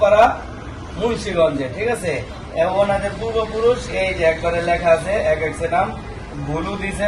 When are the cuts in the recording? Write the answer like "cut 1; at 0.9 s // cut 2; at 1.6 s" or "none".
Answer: none